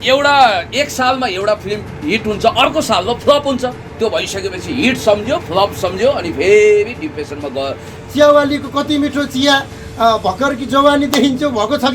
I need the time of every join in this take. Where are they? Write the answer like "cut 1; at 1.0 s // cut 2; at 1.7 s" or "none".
cut 1; at 7.9 s